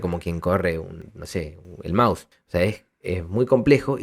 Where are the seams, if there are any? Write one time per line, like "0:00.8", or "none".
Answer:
0:01.5
0:02.3